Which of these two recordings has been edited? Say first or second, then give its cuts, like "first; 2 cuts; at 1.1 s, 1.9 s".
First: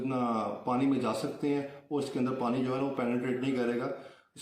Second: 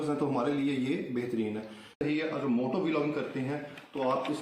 second; 1 cut; at 2.0 s